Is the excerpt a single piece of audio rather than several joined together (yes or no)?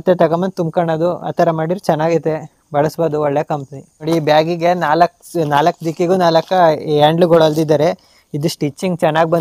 yes